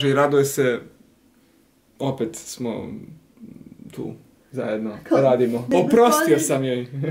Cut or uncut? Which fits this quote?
cut